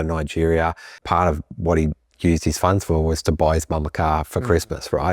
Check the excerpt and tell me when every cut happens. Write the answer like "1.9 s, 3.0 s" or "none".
1.0 s